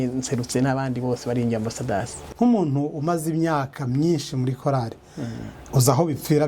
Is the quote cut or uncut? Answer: cut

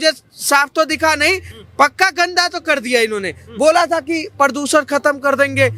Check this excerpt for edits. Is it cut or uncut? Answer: uncut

